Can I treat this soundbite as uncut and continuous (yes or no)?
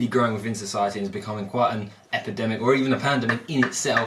yes